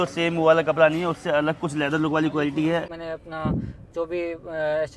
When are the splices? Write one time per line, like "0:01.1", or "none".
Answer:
0:03.0